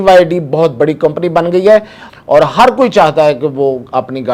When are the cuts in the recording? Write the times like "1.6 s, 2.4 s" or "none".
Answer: 2.0 s